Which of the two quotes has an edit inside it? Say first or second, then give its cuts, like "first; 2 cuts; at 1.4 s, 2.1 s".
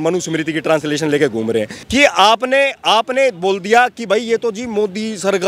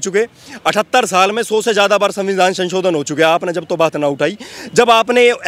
first; 1 cut; at 1.8 s